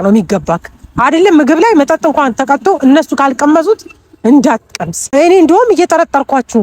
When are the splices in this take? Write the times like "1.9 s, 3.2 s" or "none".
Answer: 5.1 s